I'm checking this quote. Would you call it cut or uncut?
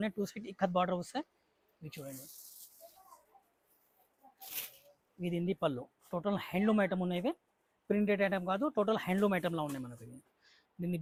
uncut